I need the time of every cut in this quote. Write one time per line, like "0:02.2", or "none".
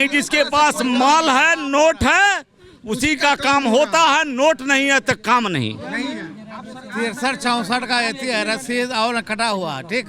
none